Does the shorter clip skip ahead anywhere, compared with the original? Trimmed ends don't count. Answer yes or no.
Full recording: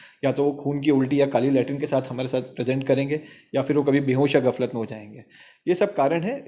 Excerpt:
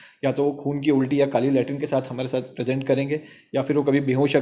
no